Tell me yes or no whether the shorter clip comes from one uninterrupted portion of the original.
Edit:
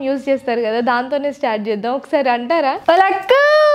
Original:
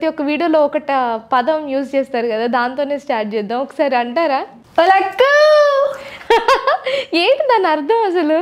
no